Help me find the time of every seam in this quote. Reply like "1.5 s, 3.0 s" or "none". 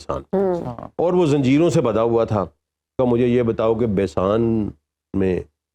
3.0 s